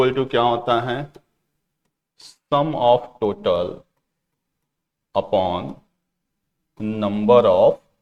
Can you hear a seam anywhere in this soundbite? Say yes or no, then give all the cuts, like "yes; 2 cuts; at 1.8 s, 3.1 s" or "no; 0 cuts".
no; 0 cuts